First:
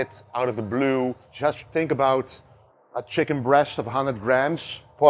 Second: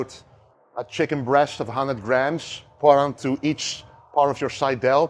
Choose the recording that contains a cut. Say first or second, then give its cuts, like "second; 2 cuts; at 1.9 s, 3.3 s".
first; 1 cut; at 1.3 s